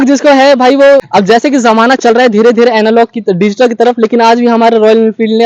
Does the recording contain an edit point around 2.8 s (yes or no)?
no